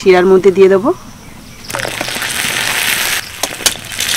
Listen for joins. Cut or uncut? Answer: cut